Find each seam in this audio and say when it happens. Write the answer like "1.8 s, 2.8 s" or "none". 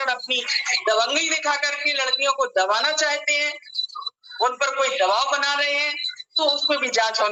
none